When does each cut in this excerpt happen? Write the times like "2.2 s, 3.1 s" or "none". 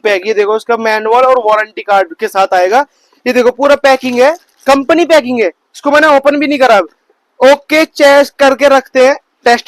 none